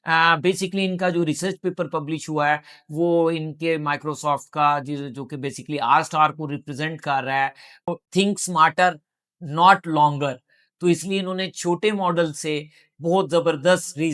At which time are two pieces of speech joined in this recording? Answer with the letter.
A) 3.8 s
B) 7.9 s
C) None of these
B